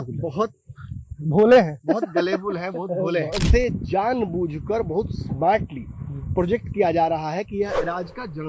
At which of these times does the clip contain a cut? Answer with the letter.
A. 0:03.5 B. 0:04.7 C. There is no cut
A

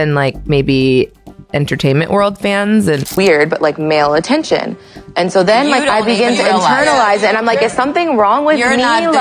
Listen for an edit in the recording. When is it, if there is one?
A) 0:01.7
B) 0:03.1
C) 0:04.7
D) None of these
B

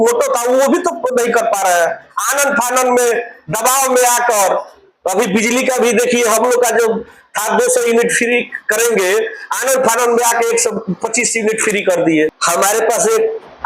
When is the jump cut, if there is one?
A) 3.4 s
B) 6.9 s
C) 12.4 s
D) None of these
C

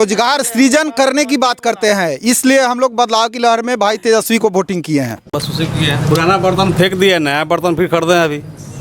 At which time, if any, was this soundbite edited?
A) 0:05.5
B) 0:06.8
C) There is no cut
A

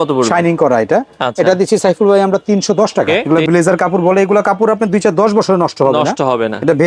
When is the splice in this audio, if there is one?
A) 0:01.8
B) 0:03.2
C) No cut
B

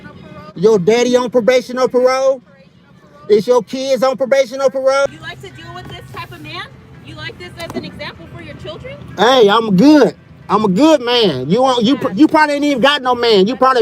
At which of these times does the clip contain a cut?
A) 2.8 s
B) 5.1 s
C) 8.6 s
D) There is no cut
B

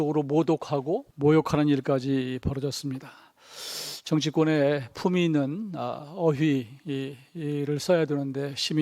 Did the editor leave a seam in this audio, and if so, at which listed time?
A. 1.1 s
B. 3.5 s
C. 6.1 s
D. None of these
A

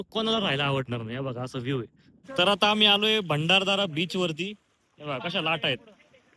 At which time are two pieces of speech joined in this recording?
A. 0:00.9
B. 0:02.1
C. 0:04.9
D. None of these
B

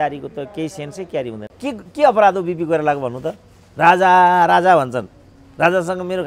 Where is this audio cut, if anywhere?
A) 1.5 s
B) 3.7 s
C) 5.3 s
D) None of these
A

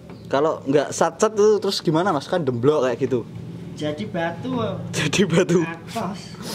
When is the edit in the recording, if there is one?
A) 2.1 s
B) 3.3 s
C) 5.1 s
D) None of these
D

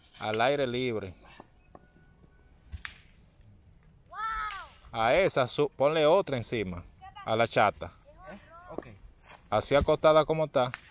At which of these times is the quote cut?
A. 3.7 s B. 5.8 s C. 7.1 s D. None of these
D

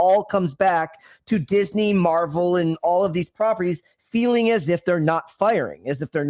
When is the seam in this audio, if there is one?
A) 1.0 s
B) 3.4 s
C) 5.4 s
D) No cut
D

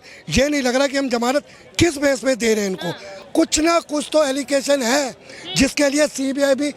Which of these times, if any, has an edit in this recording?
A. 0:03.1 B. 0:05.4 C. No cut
A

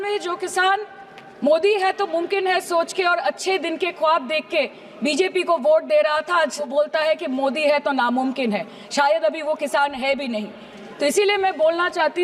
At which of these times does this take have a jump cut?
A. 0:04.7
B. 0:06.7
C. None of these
B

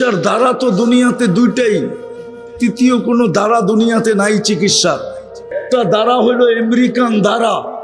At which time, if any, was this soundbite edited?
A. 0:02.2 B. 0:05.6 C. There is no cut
B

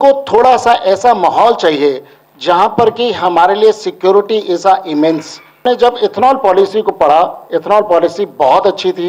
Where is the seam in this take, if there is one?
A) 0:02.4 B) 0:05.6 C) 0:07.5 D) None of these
B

